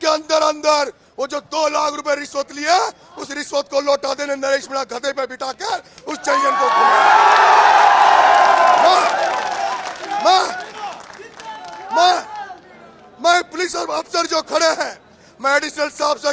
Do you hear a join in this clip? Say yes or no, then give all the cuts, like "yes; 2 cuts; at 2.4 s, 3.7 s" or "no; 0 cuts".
no; 0 cuts